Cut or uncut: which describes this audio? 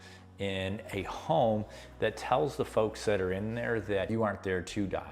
cut